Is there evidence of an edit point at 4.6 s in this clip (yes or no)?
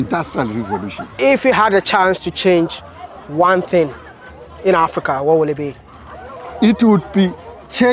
no